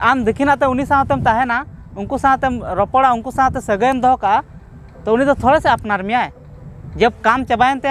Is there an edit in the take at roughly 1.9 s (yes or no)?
no